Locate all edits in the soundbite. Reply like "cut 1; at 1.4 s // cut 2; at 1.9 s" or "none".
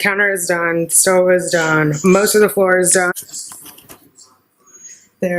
cut 1; at 3.1 s